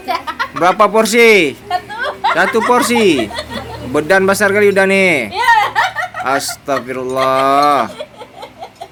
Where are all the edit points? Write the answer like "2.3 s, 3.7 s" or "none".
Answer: none